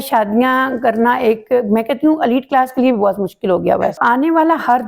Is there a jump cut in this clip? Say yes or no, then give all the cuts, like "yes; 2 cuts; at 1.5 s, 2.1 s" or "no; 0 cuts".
yes; 1 cut; at 4.0 s